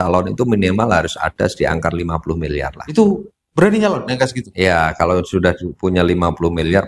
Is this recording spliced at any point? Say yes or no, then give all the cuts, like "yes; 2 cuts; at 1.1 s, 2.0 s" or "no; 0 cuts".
no; 0 cuts